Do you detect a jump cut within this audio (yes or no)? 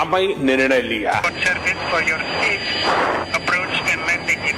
yes